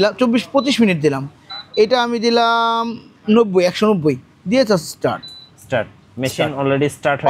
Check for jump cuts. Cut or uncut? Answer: uncut